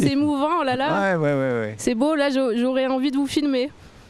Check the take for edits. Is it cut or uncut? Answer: uncut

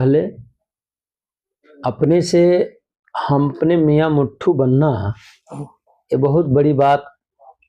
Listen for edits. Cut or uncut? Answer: uncut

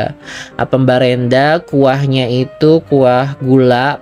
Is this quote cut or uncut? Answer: uncut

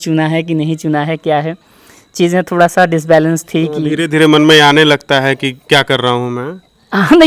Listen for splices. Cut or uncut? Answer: uncut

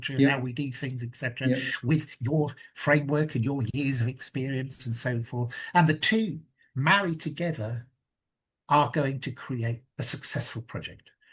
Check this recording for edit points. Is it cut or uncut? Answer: uncut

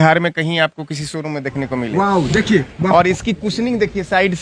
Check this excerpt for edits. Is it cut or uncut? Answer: uncut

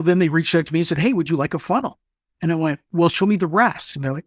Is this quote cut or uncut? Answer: uncut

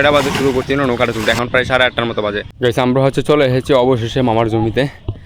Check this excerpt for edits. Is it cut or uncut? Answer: cut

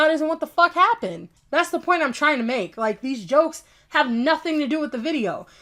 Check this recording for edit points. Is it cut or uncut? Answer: cut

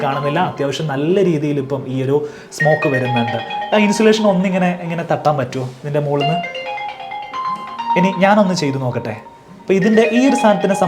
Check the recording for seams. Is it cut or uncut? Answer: uncut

